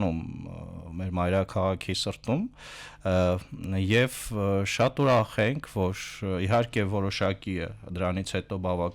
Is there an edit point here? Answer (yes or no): no